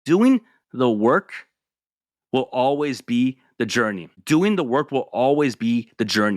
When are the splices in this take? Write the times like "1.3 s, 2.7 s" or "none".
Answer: 4.1 s